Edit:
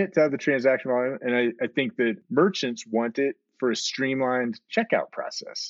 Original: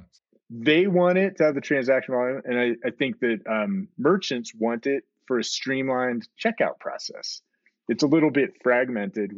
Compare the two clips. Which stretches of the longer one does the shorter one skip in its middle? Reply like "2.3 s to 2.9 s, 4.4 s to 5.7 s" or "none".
3.4 s to 3.9 s